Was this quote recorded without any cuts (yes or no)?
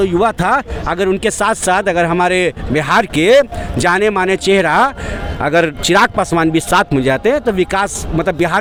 yes